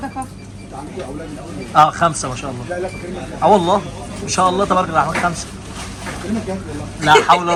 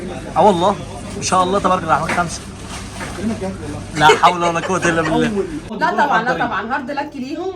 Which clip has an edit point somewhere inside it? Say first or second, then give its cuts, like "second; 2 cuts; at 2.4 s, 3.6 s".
second; 1 cut; at 5.7 s